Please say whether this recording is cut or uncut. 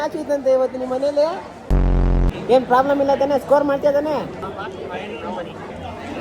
cut